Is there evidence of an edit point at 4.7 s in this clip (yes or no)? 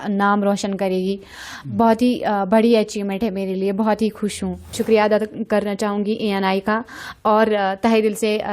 yes